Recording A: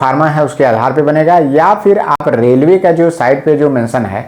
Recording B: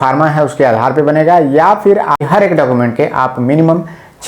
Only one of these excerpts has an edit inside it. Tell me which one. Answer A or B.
B